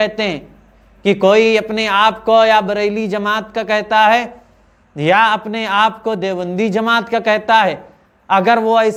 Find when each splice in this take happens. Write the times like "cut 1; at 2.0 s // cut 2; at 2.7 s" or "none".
none